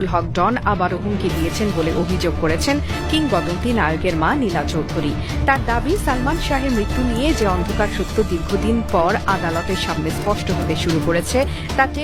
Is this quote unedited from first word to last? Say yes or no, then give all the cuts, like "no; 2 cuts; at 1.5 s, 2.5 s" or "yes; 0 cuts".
yes; 0 cuts